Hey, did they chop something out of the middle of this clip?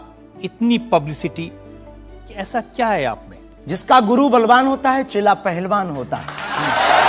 no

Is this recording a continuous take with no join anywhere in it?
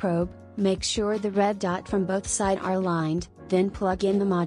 no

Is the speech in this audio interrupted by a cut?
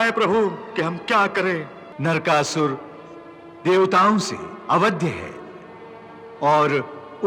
yes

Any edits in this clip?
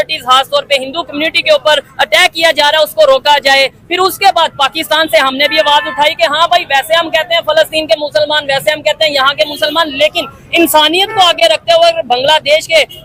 no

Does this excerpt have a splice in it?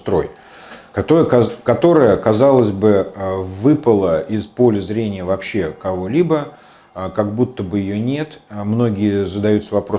no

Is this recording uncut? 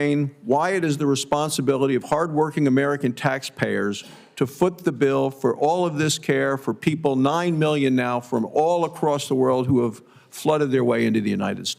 yes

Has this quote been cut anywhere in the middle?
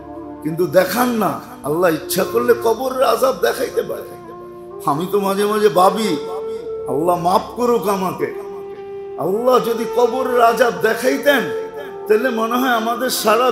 no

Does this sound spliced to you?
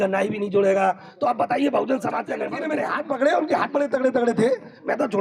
yes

